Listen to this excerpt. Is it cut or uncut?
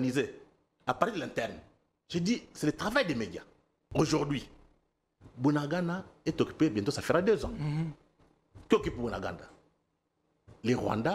cut